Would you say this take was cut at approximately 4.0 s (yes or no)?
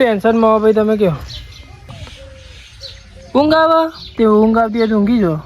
yes